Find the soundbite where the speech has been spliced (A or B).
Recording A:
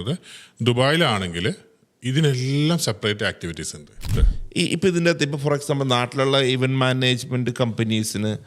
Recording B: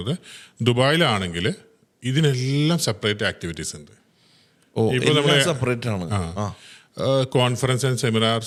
A